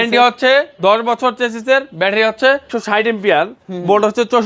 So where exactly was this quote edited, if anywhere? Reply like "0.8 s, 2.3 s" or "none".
2.7 s